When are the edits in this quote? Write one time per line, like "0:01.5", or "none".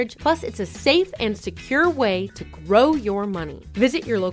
none